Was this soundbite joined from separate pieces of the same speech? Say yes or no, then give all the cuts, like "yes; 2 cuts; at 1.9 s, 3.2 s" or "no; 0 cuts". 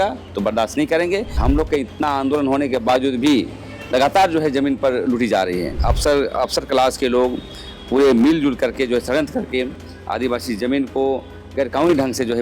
yes; 2 cuts; at 1.4 s, 5.8 s